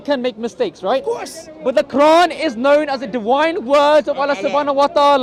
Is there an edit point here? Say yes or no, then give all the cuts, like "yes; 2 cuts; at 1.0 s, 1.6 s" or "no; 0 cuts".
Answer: no; 0 cuts